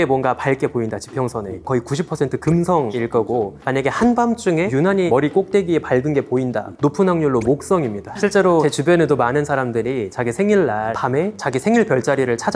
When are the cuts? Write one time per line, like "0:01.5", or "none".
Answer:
0:01.6
0:02.9
0:04.9
0:06.7
0:08.5
0:11.3